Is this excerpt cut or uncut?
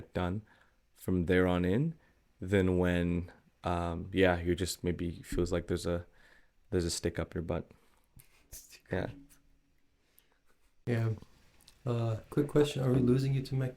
cut